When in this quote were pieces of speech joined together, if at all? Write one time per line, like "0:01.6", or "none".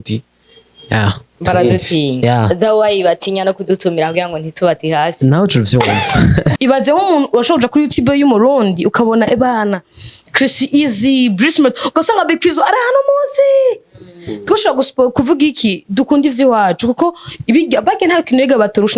0:06.5